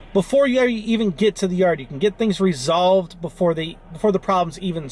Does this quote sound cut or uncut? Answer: uncut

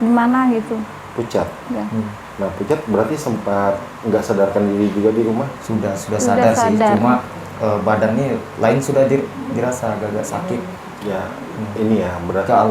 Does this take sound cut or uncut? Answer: cut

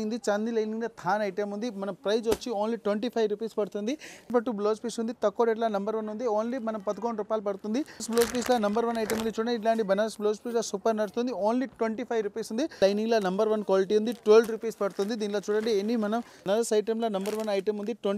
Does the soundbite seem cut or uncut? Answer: cut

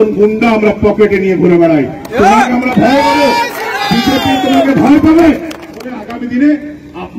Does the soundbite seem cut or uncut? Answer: cut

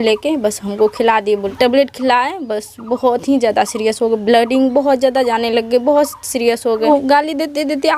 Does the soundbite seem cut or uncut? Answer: cut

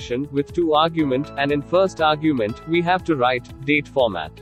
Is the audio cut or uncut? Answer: uncut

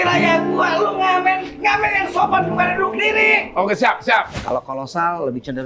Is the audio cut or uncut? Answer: cut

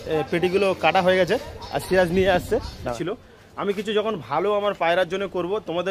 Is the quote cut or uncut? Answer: cut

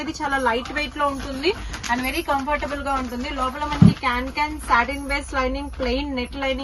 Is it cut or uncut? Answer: uncut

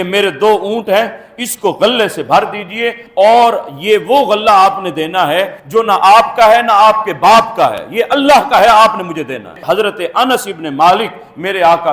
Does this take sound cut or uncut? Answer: cut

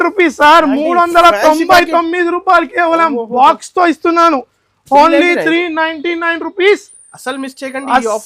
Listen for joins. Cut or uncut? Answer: uncut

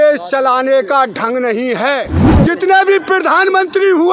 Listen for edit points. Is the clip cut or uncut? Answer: cut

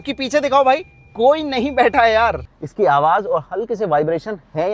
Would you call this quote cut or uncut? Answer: cut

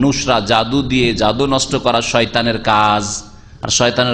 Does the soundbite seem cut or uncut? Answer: uncut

